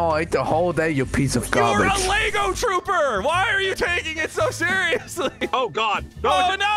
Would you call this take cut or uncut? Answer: cut